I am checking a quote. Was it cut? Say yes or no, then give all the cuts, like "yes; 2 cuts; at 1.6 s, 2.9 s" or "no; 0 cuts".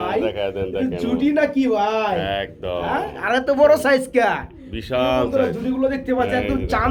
no; 0 cuts